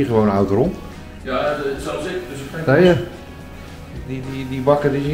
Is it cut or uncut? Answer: uncut